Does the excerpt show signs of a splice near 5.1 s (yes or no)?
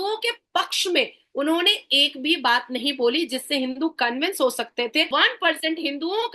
yes